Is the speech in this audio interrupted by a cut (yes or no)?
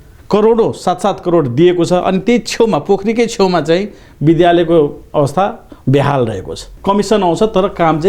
yes